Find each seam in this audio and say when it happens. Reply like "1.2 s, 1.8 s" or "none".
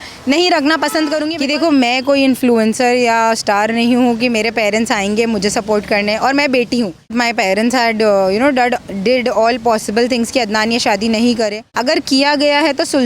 1.3 s, 7.1 s, 11.6 s